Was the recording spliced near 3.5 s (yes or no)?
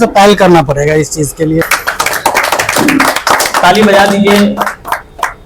no